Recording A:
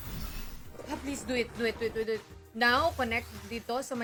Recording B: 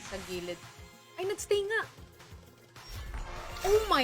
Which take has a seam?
B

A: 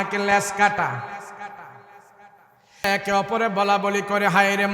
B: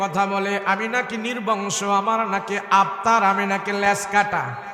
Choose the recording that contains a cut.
A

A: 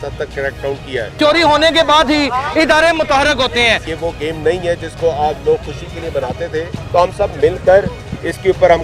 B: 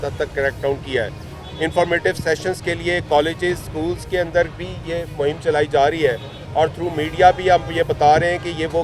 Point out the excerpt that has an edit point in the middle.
A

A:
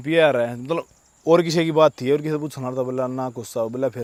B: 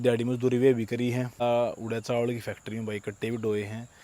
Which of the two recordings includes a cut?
B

